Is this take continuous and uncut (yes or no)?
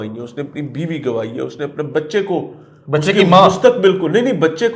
yes